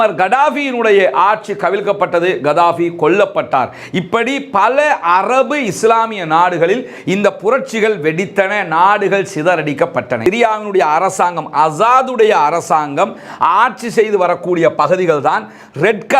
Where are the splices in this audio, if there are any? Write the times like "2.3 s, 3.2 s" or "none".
10.2 s